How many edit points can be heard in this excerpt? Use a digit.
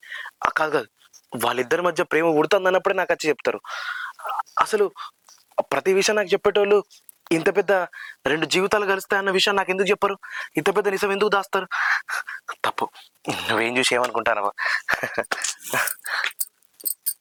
0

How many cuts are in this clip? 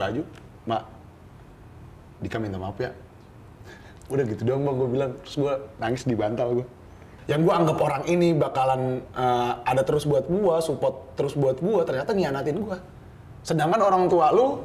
1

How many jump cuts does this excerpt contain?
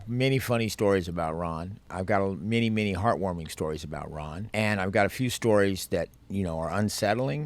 3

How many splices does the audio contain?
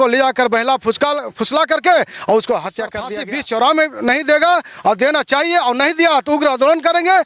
1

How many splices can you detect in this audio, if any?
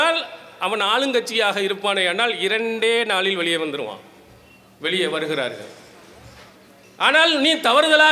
0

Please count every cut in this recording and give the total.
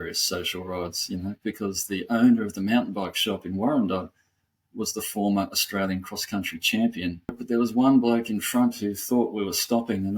1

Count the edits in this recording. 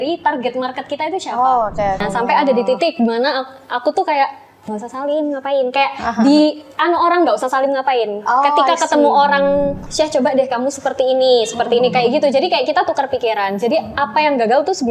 2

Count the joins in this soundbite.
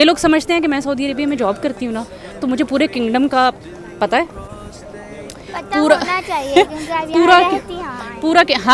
0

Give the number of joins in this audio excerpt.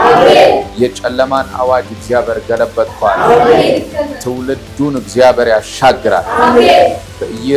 0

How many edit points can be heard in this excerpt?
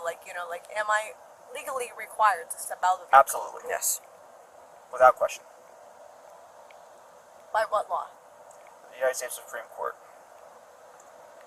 0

